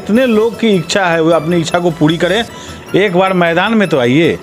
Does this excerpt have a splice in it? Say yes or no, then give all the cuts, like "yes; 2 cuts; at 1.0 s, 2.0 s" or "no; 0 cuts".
no; 0 cuts